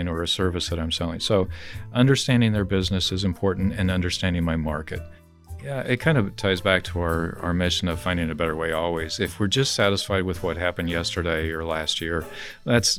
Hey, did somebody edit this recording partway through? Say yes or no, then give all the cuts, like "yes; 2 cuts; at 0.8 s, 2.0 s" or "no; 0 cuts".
yes; 1 cut; at 5.3 s